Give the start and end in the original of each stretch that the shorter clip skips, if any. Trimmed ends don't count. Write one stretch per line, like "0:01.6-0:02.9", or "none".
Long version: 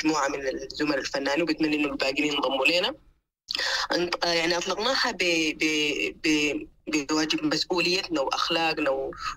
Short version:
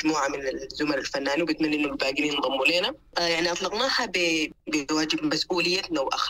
0:03.1-0:04.2
0:05.6-0:06.7